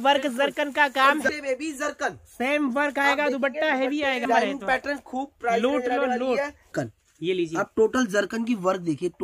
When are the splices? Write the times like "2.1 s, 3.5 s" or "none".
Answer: 1.3 s, 4.2 s, 6.7 s